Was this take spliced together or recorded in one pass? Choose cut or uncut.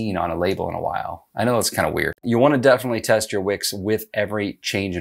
cut